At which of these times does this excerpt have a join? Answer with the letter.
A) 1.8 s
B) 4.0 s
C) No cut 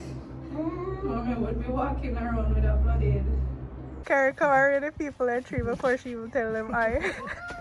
B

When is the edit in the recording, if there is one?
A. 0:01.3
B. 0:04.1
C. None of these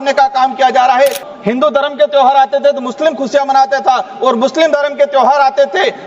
A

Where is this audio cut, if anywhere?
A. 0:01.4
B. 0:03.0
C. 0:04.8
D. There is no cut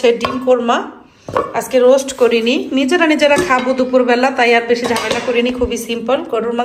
D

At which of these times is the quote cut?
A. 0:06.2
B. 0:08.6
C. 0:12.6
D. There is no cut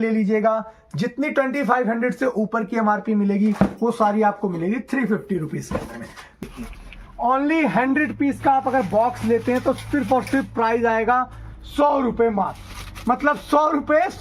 A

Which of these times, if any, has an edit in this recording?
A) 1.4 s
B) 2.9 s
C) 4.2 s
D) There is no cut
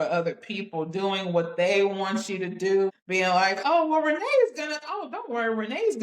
B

